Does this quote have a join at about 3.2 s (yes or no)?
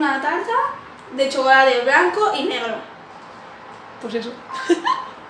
no